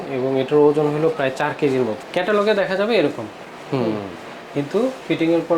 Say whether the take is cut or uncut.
cut